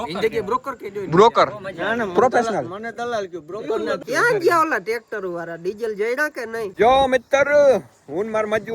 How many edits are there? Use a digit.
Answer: 2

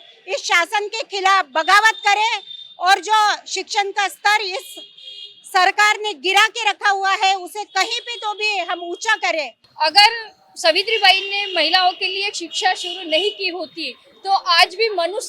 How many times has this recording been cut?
1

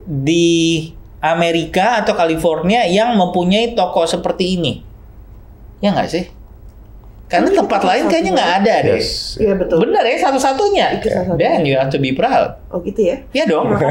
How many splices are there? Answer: 0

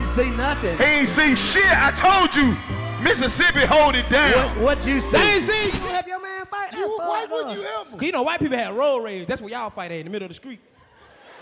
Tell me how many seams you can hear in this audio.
1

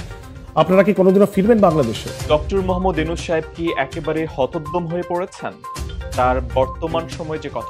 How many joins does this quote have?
1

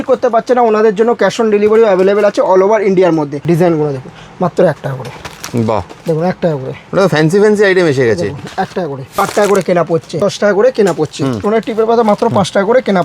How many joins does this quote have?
4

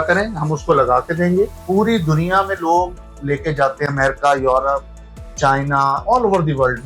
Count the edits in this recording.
1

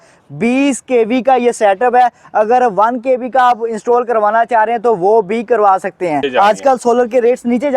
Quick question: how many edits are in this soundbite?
1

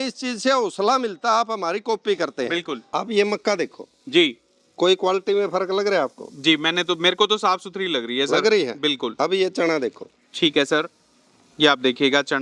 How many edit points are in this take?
1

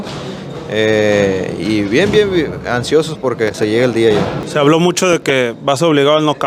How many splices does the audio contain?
1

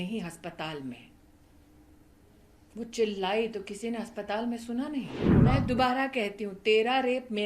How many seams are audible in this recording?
1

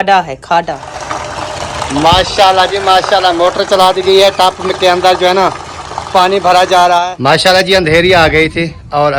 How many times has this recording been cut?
2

